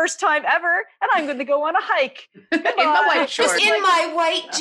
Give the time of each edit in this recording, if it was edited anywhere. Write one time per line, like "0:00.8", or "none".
0:03.6